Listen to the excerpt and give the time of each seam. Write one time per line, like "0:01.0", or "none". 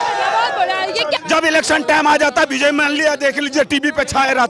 0:01.2